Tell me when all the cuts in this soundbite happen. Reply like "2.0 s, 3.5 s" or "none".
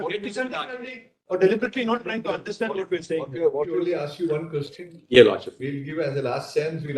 3.8 s